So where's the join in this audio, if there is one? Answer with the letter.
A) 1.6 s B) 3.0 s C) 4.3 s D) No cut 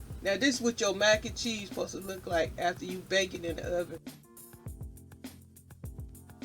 C